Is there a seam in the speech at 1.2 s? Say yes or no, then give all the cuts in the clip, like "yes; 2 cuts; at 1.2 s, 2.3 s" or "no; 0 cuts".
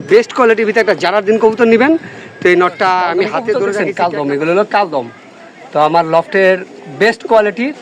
no; 1 cut; at 3.8 s